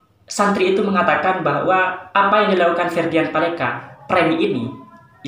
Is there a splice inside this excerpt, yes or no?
no